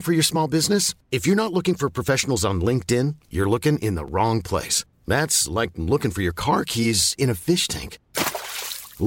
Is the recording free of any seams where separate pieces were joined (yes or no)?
yes